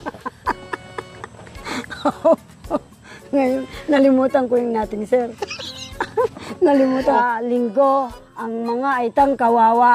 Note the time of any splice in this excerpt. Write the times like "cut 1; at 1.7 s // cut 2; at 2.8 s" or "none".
cut 1; at 7.1 s